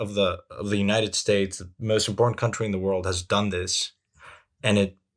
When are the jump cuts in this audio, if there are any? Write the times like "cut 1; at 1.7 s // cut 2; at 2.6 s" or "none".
none